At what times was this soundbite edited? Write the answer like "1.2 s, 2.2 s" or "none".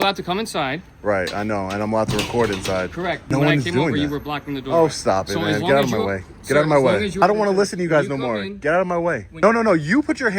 3.3 s, 7.2 s, 9.3 s